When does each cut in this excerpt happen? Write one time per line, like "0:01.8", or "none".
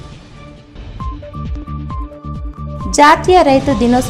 0:02.5